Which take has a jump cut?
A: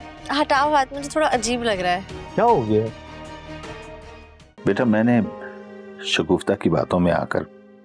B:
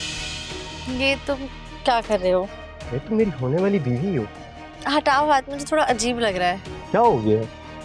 A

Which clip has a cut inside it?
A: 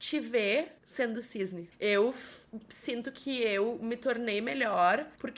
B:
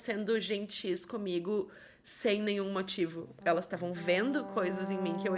A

